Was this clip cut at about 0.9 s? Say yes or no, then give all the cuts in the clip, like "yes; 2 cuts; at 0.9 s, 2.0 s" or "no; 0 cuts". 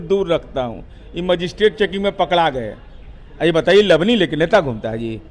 no; 0 cuts